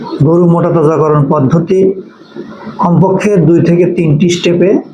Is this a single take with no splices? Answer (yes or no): yes